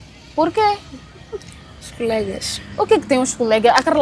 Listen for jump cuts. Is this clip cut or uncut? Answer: uncut